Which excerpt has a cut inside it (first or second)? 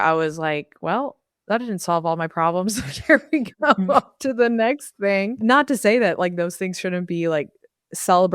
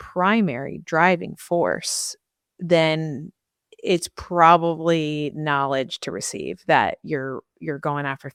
first